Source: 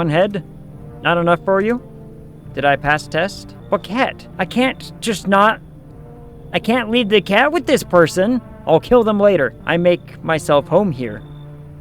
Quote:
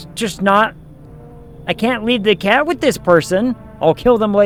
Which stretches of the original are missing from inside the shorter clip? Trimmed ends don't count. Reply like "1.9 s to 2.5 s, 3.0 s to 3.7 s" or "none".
none